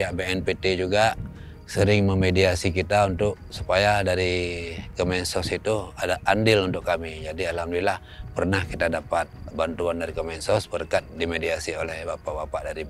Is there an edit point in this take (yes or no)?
no